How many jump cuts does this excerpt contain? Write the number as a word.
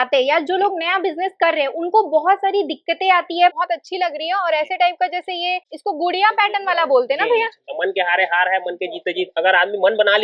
three